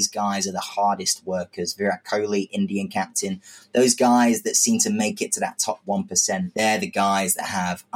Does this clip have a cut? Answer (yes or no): yes